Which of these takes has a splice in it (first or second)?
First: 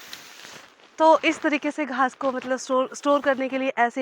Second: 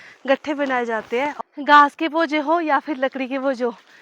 second